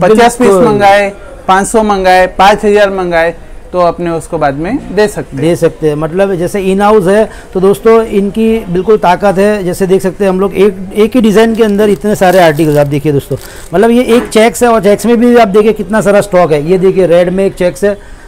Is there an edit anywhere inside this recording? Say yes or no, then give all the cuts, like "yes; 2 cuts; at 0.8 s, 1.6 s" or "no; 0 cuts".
no; 0 cuts